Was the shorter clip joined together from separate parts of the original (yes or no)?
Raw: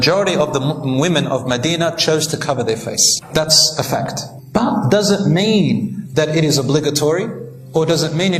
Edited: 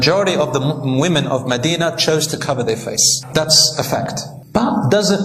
no